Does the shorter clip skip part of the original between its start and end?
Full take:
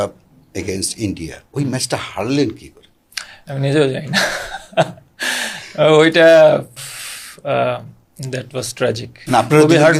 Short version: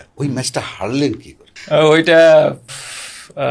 yes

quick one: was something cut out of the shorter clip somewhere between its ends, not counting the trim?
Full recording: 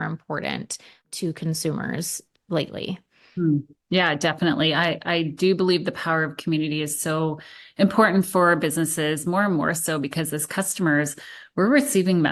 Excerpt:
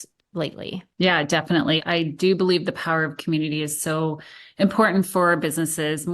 yes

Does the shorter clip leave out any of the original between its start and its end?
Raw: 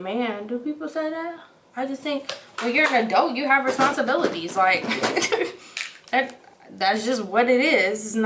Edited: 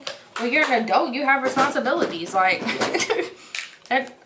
no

